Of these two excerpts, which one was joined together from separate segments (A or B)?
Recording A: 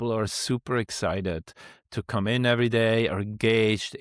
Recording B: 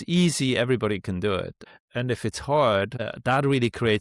B